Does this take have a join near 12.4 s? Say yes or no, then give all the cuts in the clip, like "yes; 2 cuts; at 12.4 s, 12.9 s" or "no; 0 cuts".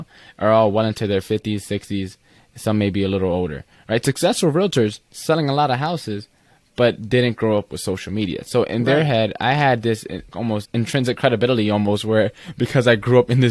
no; 1 cut; at 10.6 s